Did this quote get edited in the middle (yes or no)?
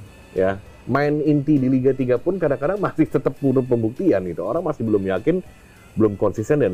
no